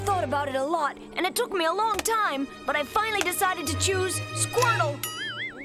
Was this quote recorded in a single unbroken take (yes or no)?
yes